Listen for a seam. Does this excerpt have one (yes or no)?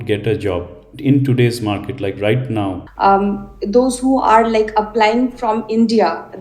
yes